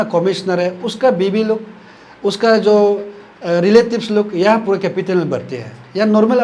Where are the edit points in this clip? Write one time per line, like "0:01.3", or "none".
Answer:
none